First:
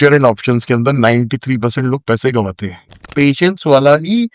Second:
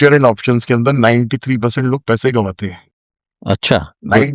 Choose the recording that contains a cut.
first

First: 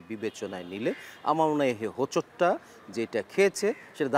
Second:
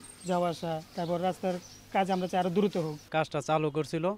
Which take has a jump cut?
second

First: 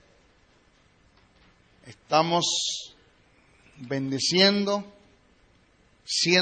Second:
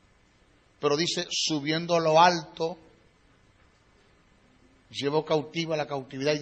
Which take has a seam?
first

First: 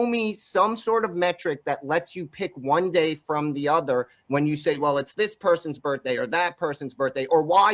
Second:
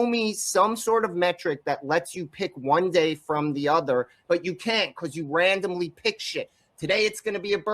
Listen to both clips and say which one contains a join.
second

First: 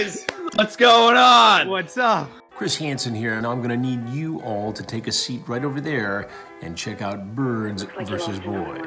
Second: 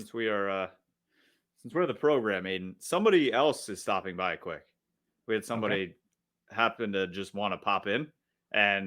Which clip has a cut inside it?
first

